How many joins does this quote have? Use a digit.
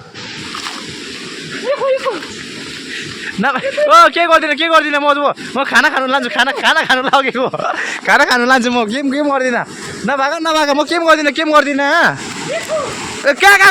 0